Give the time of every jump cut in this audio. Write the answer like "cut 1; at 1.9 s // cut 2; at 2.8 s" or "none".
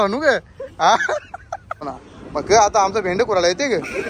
cut 1; at 1.9 s